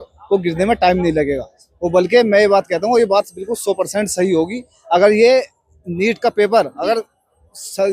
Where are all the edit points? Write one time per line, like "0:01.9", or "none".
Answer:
none